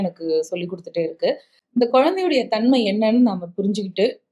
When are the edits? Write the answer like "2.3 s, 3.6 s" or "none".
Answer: 1.5 s